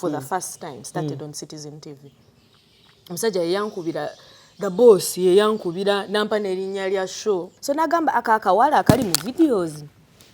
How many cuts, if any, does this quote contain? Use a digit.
1